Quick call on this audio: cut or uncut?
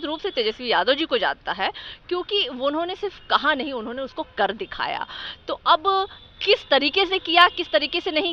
uncut